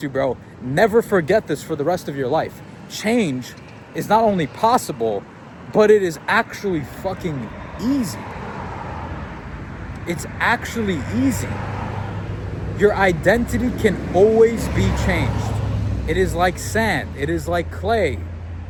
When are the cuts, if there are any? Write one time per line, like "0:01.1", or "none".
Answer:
none